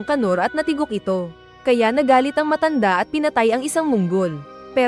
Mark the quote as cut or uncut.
uncut